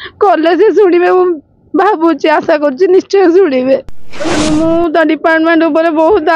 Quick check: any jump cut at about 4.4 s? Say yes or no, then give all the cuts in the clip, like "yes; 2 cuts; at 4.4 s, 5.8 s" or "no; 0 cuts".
yes; 1 cut; at 4.4 s